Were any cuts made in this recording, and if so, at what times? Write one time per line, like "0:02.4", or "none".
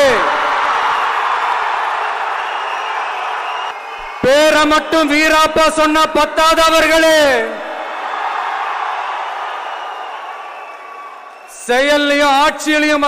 0:03.7